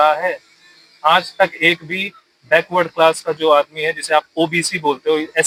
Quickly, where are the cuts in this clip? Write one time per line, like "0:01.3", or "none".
none